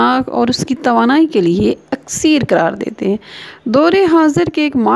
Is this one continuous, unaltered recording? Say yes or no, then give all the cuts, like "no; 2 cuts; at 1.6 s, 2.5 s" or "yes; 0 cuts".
yes; 0 cuts